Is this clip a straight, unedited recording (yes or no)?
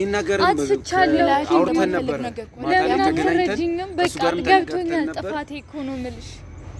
yes